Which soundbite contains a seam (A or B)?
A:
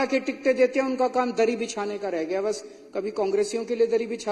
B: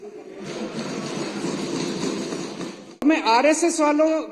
B